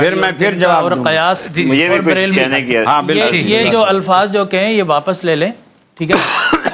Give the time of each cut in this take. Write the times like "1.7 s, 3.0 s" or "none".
none